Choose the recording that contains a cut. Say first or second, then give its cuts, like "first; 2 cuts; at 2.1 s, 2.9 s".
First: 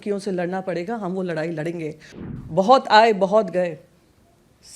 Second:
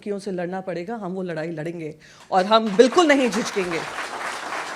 first; 1 cut; at 2.1 s